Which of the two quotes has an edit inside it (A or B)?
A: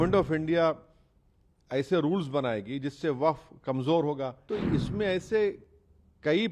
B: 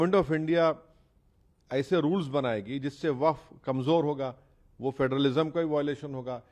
A